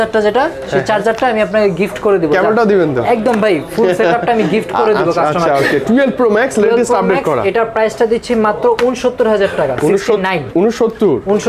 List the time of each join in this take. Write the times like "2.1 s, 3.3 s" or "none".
none